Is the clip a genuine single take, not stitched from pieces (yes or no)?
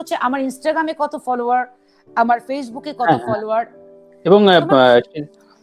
yes